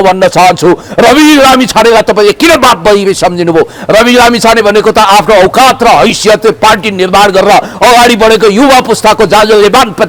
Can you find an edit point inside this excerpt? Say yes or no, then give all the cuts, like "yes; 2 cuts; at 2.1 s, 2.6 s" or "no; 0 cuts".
no; 0 cuts